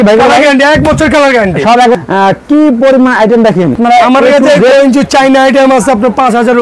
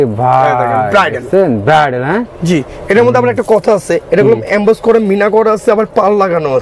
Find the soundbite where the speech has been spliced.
first; 2 cuts; at 2.0 s, 3.8 s

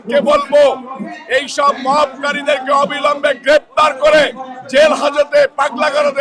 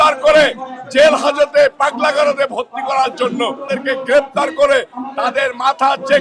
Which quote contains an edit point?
second; 1 cut; at 3.6 s

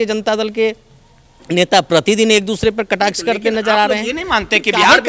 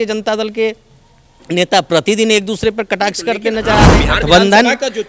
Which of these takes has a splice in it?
second; 1 cut; at 4.0 s

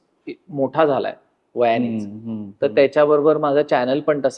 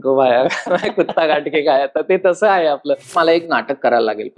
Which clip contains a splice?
second; 1 cut; at 3.1 s

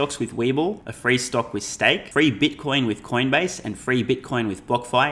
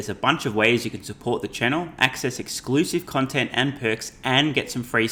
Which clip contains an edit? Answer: first; 2 cuts; at 0.9 s, 2.0 s

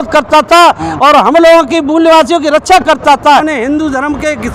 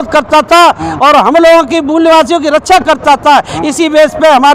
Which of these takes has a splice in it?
first; 1 cut; at 3.5 s

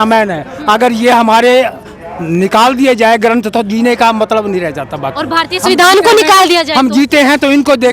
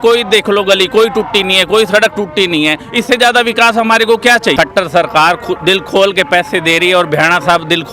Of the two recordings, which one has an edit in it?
second; 1 cut; at 4.5 s

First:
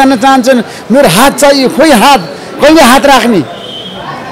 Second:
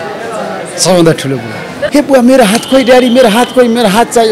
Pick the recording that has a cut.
second; 1 cut; at 1.7 s

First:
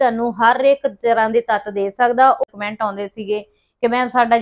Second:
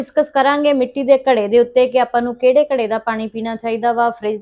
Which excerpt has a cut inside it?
first; 1 cut; at 2.5 s

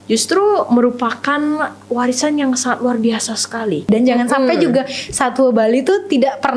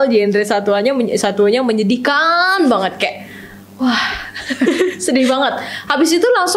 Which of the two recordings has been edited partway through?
first; 1 cut; at 3.9 s

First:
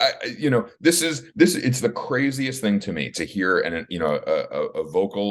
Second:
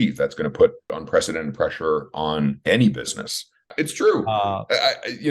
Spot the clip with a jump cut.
second; 3 cuts; at 0.9 s, 2.6 s, 3.7 s

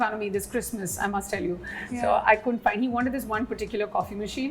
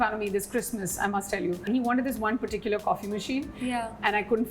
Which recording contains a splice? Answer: second; 1 cut; at 1.7 s

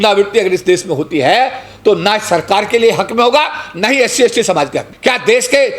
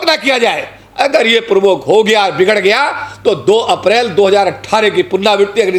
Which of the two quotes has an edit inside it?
first; 1 cut; at 4.8 s

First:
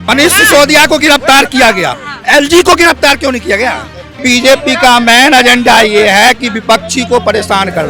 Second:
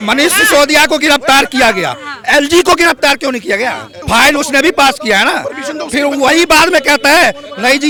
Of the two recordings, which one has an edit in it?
first; 1 cut; at 4.1 s

